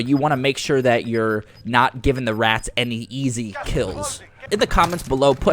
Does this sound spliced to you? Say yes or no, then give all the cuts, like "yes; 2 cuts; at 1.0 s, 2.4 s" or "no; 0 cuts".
yes; 1 cut; at 4.4 s